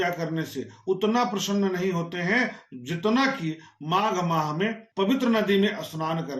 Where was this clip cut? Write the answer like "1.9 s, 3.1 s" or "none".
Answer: 4.8 s